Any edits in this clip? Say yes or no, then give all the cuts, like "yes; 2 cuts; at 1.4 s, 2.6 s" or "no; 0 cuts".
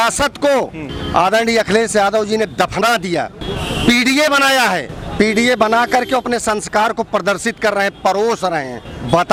no; 0 cuts